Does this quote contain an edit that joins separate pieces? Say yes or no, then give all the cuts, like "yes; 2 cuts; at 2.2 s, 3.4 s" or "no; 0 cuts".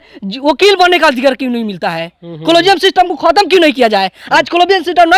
no; 0 cuts